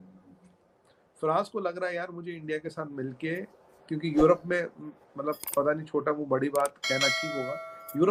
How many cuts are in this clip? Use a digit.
0